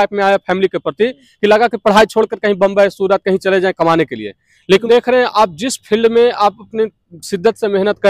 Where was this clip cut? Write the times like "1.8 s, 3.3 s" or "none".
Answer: 4.8 s